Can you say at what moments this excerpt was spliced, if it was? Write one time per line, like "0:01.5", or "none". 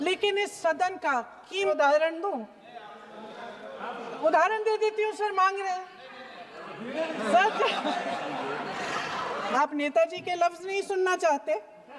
0:01.7
0:09.5